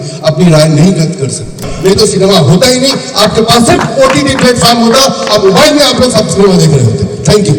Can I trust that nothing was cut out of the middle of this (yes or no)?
no